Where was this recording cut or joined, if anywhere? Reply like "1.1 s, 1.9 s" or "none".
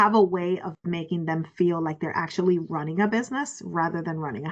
none